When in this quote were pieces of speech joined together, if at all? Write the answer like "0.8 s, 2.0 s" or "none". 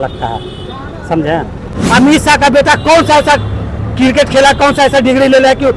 1.7 s

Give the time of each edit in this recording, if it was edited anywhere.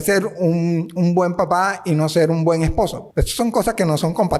3.0 s

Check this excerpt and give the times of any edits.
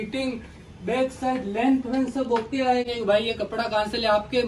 2.9 s

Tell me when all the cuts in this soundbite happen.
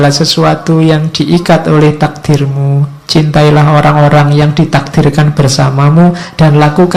none

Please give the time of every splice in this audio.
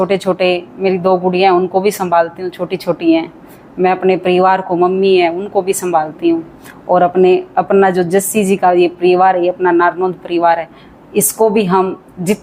none

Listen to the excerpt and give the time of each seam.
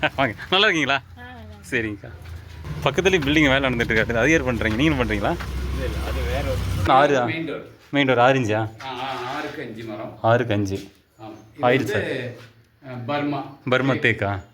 2.6 s, 6.9 s

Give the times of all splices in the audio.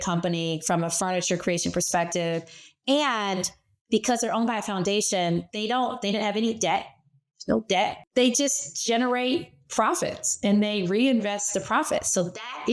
8.0 s

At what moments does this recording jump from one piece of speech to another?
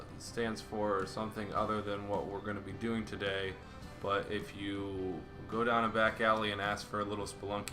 3.2 s

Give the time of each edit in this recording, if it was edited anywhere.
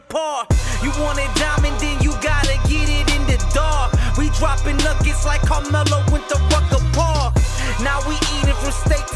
none

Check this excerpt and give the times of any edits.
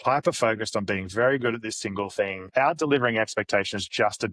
none

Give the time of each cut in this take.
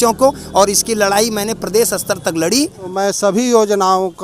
2.9 s

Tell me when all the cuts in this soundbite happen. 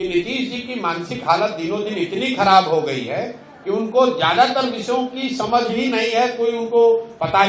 none

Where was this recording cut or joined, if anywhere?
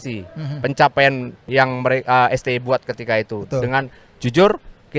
1.5 s

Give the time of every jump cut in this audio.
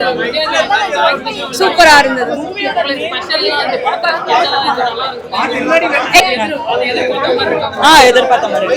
6.2 s

